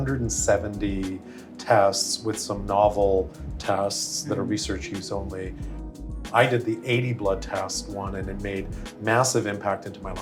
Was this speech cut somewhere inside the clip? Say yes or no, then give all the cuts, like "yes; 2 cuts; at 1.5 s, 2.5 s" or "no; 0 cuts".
no; 0 cuts